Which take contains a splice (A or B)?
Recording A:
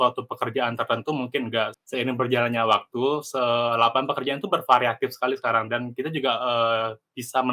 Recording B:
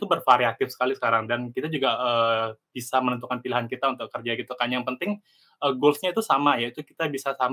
A